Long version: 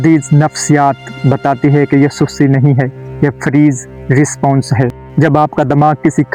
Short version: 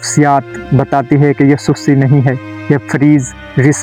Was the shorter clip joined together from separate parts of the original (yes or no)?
no